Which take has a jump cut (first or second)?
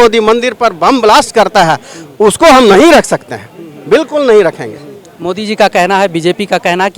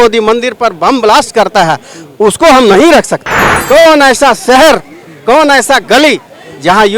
second